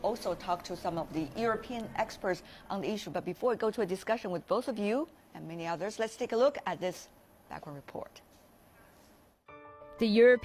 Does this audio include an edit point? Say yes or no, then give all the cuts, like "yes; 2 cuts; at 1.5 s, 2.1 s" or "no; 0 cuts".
no; 0 cuts